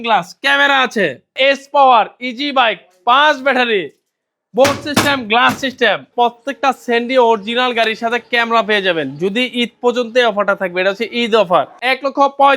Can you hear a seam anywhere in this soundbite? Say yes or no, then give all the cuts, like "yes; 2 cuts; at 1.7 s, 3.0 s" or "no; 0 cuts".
yes; 3 cuts; at 1.3 s, 6.1 s, 11.7 s